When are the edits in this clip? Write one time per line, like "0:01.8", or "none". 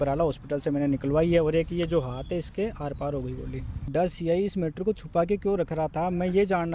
0:03.9